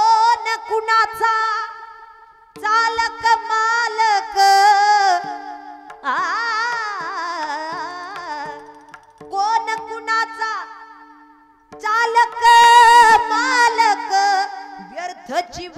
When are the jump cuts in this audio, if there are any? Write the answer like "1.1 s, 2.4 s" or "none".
none